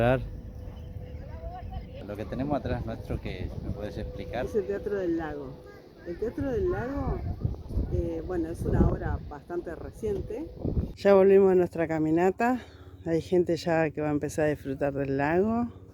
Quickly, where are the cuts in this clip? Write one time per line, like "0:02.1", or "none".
0:02.0
0:11.0